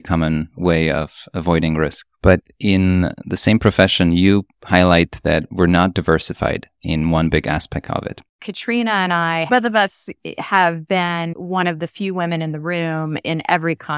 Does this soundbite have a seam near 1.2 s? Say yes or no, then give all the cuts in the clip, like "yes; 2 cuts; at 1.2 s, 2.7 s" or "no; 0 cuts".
no; 2 cuts; at 8.3 s, 9.5 s